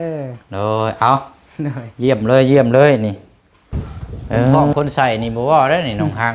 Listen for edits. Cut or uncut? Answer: cut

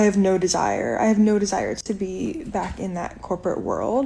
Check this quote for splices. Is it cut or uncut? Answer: uncut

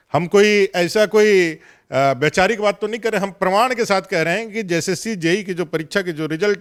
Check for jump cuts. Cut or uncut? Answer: uncut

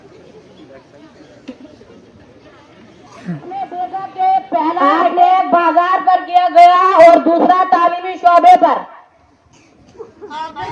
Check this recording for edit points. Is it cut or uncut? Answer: cut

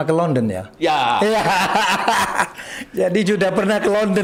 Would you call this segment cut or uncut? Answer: uncut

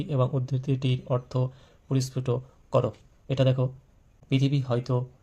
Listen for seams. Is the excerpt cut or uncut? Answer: cut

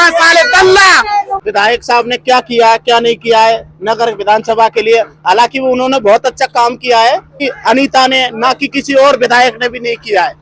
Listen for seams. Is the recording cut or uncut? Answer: cut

